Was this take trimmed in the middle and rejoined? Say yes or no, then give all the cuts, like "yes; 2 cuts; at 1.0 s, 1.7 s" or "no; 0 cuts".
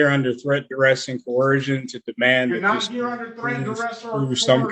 no; 0 cuts